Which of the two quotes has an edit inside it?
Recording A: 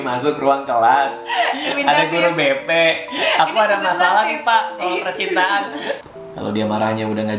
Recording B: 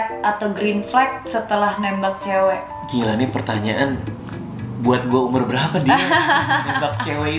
A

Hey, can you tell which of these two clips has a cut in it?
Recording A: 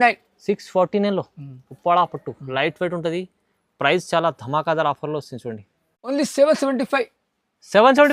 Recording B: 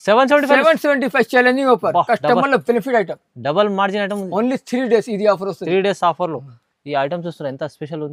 A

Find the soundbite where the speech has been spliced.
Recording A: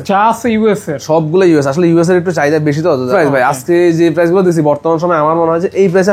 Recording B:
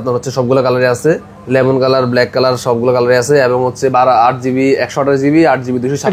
A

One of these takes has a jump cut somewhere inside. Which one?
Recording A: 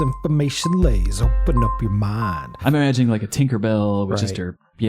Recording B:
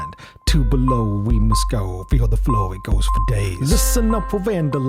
A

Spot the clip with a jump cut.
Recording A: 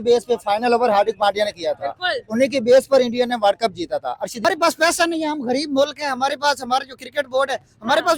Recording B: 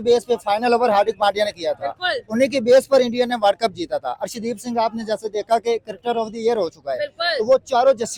A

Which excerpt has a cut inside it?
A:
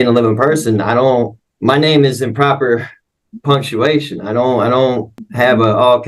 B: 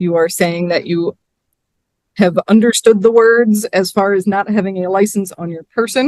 A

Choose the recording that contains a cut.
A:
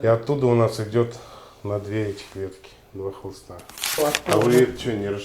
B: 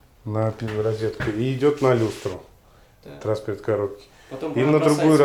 A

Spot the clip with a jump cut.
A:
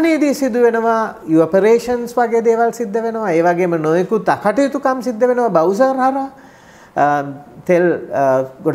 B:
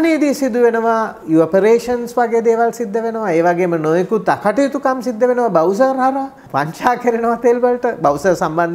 B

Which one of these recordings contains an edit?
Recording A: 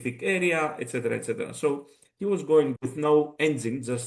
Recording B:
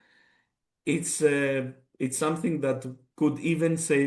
A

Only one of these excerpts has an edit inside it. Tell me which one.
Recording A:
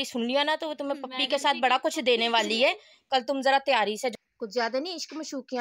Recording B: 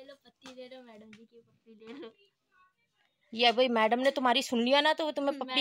A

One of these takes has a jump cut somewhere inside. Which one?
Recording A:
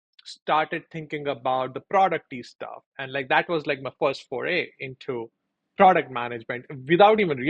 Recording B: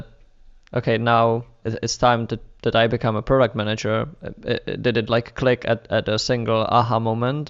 B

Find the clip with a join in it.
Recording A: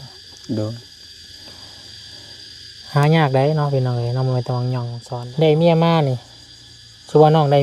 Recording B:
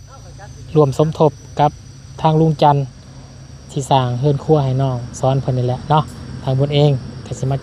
A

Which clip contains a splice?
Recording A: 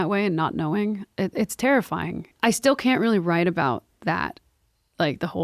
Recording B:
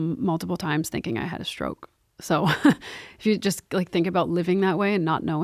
A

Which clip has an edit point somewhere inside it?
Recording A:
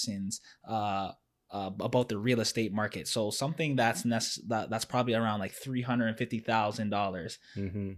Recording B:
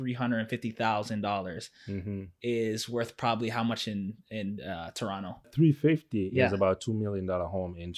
B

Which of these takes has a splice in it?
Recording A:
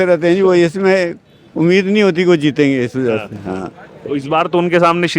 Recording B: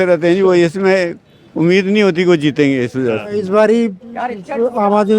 B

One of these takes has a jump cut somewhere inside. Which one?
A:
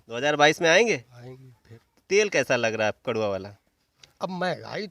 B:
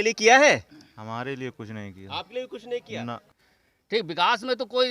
B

